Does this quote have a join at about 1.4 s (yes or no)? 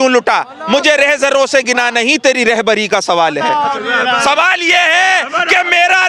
no